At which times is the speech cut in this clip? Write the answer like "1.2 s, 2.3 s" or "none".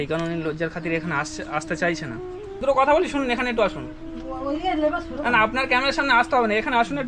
2.6 s